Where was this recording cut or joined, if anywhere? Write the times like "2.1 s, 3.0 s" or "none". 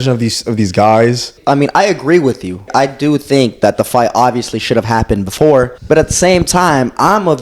1.4 s, 2.7 s, 5.8 s